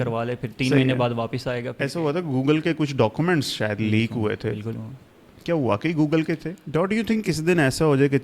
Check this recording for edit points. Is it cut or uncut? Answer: cut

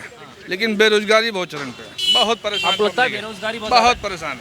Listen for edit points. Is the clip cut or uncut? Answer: uncut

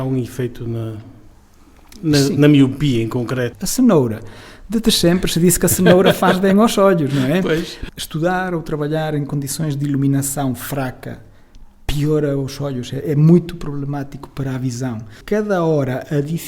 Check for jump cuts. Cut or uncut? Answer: cut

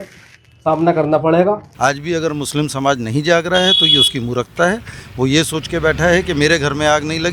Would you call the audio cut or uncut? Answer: cut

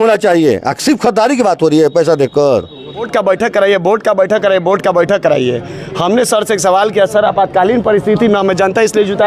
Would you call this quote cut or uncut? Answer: cut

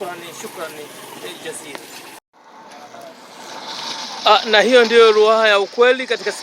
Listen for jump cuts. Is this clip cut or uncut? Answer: cut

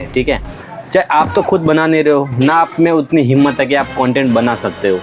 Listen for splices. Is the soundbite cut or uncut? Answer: uncut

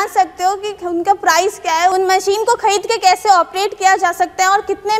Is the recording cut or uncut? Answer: uncut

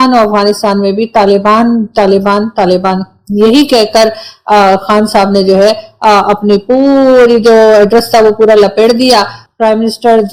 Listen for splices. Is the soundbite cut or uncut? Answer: uncut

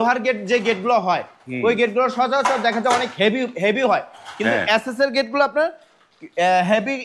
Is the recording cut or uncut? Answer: uncut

